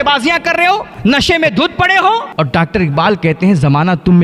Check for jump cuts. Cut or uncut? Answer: cut